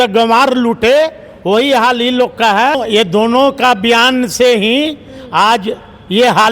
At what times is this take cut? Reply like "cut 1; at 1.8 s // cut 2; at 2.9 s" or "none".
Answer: cut 1; at 2.8 s

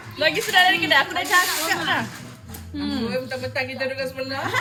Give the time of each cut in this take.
none

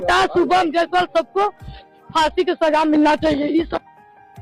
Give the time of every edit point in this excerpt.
none

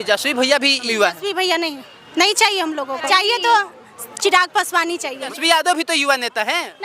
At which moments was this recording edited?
cut 1; at 0.9 s // cut 2; at 3.0 s // cut 3; at 5.4 s

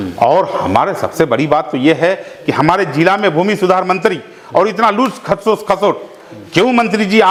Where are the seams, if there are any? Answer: none

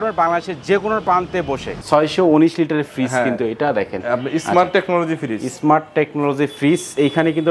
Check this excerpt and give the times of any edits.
cut 1; at 1.8 s

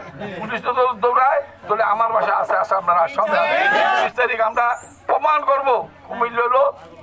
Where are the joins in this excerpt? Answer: cut 1; at 4.1 s

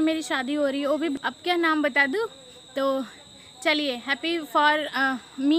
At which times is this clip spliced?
cut 1; at 1.1 s

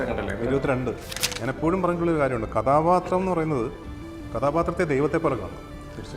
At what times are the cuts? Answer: cut 1; at 1.1 s

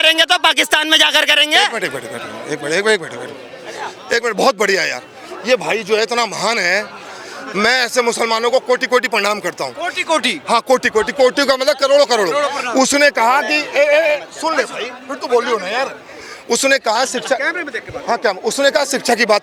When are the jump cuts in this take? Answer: none

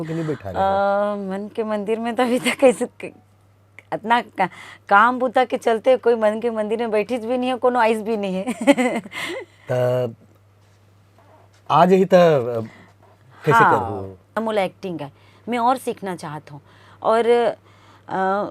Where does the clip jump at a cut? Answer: cut 1; at 14.4 s

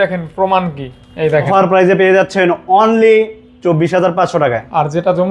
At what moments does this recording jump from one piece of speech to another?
cut 1; at 1.5 s

